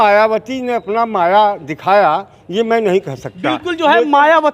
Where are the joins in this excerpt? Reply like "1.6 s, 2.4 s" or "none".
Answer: none